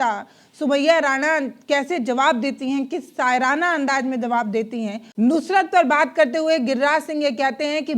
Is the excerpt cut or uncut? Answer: cut